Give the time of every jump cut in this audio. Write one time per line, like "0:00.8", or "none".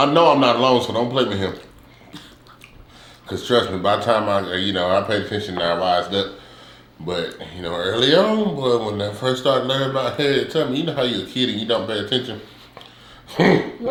none

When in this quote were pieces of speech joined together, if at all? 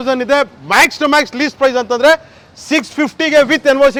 none

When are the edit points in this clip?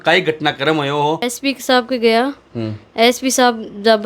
0:01.4

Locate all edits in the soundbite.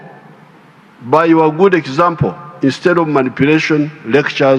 none

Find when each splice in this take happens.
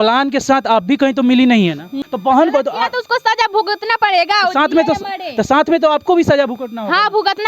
0:01.9

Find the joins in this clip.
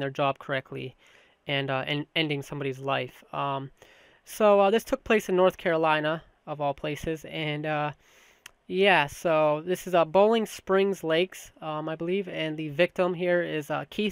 none

